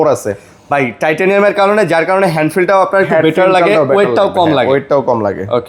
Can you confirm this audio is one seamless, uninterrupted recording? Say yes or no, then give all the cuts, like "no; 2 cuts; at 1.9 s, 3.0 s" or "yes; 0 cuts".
yes; 0 cuts